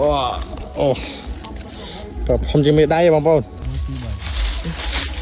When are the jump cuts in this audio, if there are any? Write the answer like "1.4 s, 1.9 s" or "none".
3.6 s